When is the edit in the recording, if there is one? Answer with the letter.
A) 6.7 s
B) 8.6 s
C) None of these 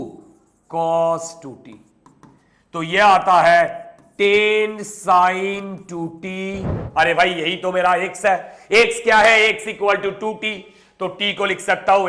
A